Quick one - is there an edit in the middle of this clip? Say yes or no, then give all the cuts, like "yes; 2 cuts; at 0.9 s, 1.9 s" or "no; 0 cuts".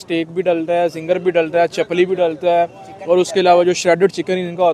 no; 0 cuts